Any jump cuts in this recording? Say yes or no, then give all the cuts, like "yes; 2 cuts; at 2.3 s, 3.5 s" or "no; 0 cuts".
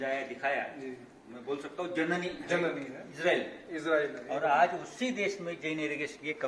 no; 0 cuts